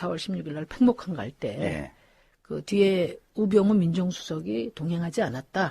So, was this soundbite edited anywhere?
yes; 1 cut; at 2.7 s

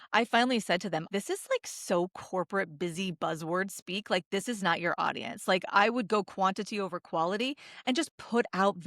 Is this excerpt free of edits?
no; 1 cut; at 1.0 s

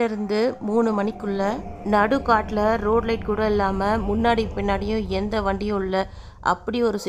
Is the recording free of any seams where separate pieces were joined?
yes; 0 cuts

